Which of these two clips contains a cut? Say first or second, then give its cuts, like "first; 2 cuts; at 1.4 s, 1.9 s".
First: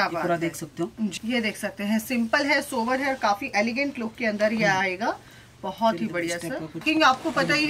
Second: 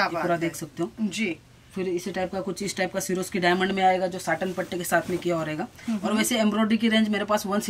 first; 2 cuts; at 1.1 s, 6.8 s